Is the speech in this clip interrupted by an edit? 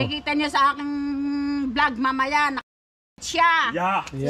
no; 0 cuts

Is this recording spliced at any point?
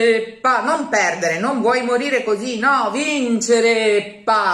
no; 0 cuts

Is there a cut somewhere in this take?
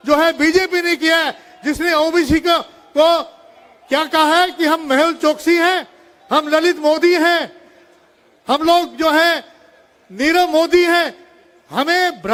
no; 0 cuts

